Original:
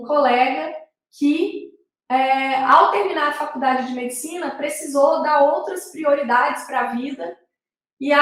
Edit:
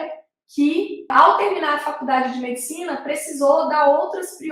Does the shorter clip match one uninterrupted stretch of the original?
no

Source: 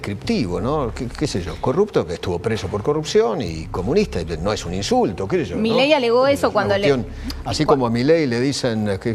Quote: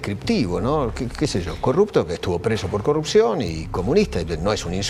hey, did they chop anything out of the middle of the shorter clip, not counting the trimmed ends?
no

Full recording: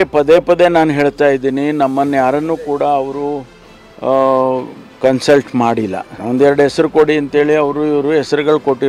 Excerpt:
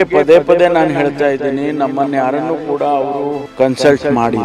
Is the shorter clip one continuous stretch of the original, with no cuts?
no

